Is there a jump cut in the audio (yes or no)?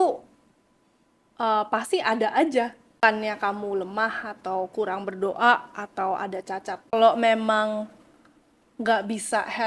yes